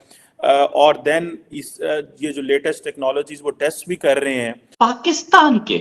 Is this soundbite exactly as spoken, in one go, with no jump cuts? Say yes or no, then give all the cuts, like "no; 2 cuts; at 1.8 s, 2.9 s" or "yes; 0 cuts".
no; 1 cut; at 4.6 s